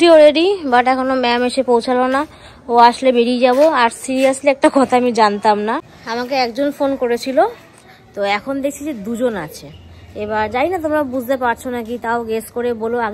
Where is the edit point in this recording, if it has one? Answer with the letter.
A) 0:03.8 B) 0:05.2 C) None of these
C